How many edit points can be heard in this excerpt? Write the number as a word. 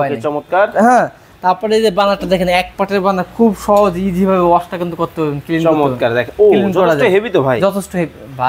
zero